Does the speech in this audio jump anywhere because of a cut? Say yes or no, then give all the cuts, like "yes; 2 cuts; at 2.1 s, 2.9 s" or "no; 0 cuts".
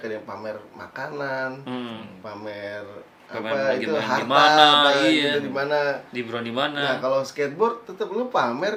no; 0 cuts